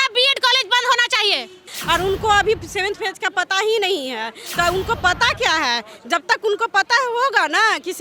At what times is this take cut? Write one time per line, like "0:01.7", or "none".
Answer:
0:01.7